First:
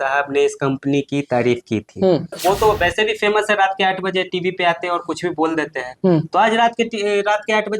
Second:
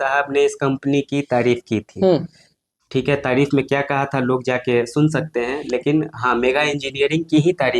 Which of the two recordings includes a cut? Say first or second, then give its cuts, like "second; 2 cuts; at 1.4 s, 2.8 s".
first; 1 cut; at 2.4 s